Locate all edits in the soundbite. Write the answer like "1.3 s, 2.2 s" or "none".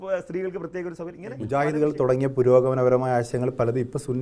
1.4 s